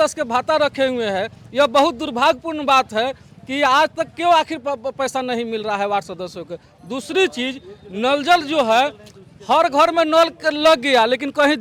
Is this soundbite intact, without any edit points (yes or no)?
yes